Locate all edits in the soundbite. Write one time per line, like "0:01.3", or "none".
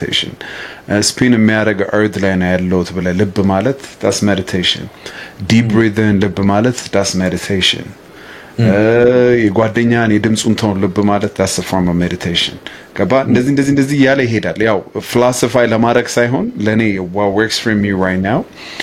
none